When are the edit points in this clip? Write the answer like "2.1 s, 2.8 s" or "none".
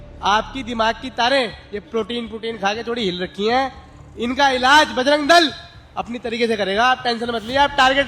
none